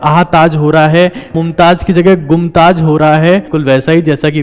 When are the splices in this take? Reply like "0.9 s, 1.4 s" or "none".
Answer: 1.4 s, 3.5 s